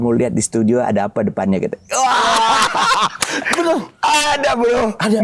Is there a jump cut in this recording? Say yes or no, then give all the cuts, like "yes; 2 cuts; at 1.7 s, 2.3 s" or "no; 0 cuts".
no; 0 cuts